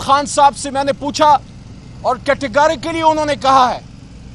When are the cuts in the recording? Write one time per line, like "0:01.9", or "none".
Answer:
none

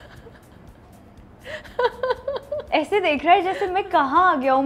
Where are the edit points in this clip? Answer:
0:02.6

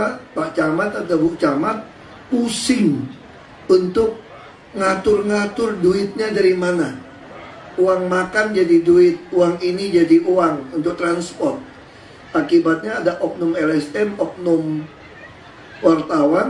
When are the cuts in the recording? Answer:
0:09.7

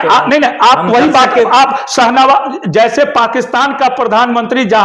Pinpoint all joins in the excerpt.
none

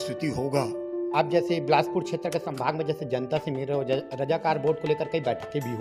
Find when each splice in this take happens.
0:01.0

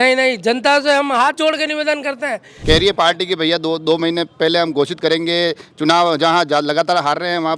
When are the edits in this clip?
0:02.5

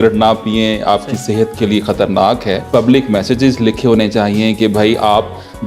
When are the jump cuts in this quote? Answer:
0:02.6

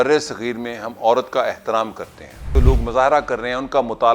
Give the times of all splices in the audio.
0:02.5

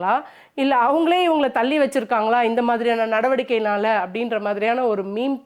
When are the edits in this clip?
none

